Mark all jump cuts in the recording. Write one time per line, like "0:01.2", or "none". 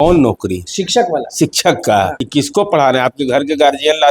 0:02.2